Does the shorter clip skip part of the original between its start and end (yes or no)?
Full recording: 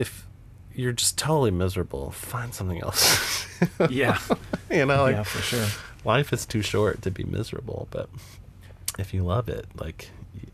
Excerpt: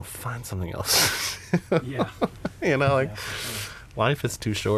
no